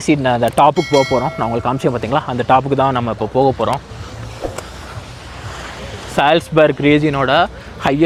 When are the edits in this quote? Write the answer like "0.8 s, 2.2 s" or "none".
none